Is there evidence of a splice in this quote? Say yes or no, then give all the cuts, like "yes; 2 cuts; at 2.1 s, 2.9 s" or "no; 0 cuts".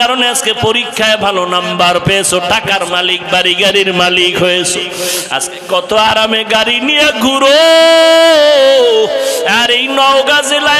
no; 0 cuts